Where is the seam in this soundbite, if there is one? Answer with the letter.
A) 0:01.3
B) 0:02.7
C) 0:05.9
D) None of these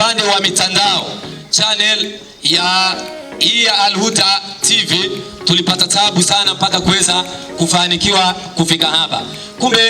A